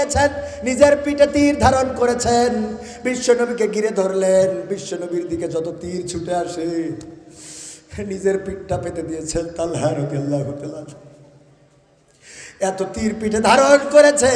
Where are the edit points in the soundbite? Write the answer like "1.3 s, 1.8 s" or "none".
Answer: none